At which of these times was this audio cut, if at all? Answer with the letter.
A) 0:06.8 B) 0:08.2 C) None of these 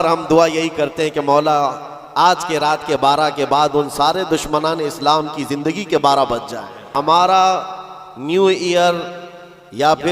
A